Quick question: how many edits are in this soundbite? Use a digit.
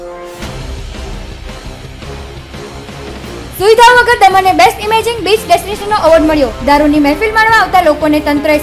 1